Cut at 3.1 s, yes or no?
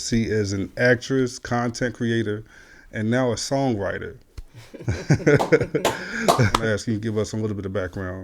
no